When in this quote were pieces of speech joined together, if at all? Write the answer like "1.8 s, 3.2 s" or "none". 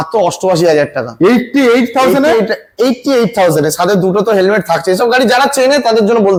none